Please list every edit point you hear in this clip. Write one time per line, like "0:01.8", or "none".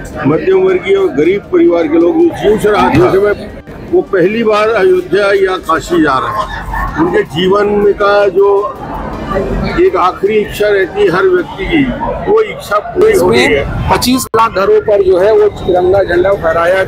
0:03.4
0:14.2